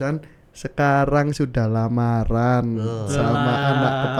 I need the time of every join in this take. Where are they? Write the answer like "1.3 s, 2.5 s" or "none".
none

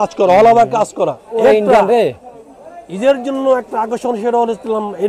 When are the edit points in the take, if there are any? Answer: 1.2 s

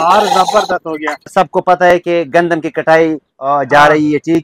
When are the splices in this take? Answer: 1.3 s

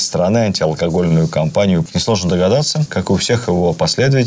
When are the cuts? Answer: 1.9 s, 2.8 s

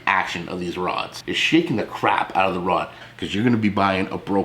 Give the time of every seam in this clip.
1.2 s, 3.0 s

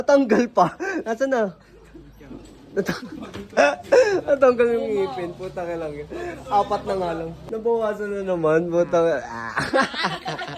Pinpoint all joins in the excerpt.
7.5 s

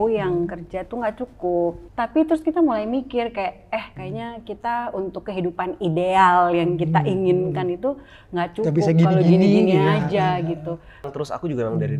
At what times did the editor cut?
1.8 s, 4.0 s, 11.1 s

